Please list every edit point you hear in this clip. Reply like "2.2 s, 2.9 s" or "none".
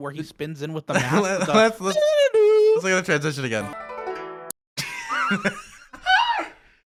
none